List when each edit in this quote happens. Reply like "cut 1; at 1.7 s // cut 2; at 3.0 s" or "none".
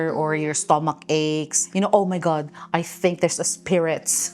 cut 1; at 1.6 s